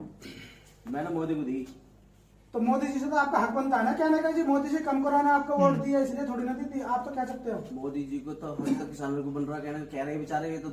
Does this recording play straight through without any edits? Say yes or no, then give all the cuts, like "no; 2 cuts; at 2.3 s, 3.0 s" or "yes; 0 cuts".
yes; 0 cuts